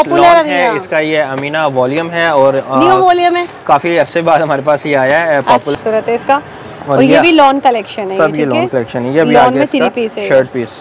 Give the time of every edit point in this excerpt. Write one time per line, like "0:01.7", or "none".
0:05.7